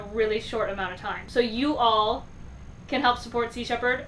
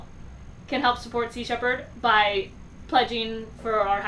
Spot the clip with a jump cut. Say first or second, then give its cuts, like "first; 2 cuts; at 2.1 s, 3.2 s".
first; 1 cut; at 1.2 s